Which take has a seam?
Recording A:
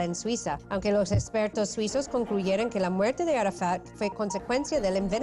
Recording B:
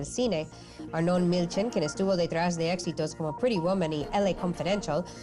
A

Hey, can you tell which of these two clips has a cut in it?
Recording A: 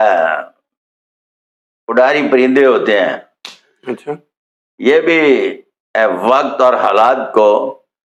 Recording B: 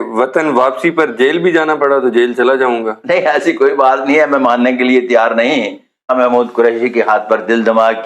B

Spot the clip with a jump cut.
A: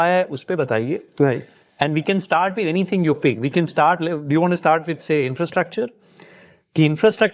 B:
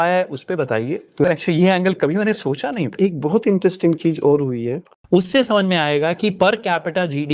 B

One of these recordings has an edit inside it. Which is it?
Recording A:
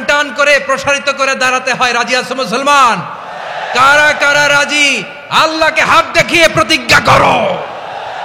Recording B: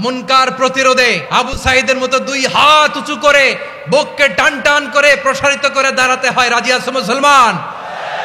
B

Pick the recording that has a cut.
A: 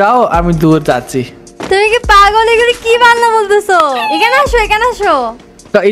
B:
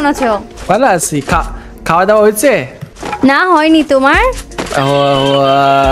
B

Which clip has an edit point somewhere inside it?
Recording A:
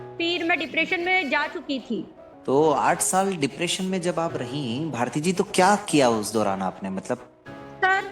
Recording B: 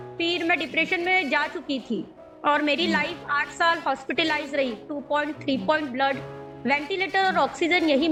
A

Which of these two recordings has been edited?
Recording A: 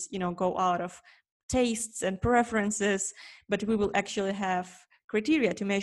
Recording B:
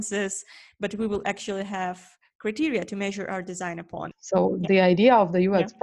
B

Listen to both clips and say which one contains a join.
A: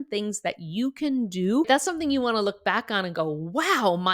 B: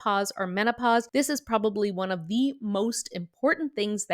A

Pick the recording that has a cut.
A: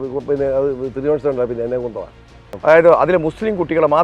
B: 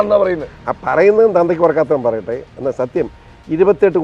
A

